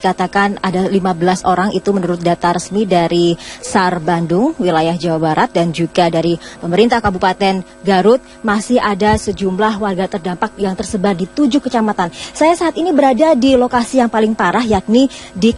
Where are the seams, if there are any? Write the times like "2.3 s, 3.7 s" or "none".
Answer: 13.9 s